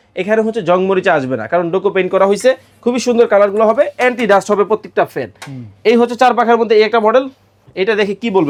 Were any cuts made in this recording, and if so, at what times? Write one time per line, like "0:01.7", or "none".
none